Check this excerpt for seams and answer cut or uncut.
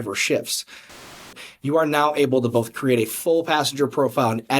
cut